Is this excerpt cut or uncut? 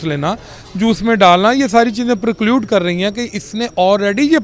uncut